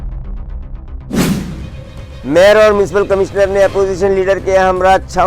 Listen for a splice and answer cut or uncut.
cut